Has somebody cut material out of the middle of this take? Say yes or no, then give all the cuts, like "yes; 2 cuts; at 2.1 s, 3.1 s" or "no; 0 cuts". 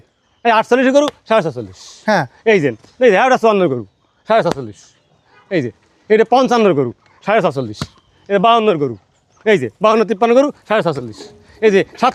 no; 0 cuts